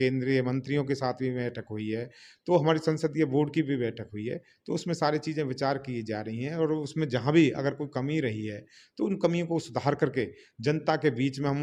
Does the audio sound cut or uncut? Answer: uncut